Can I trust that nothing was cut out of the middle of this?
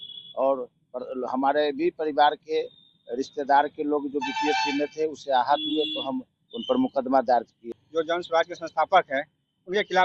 no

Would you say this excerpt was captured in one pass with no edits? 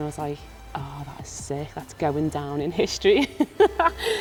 yes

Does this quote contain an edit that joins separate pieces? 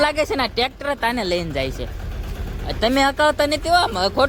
no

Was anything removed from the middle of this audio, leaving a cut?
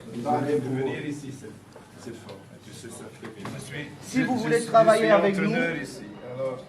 yes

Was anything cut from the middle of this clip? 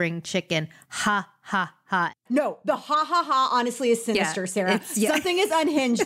yes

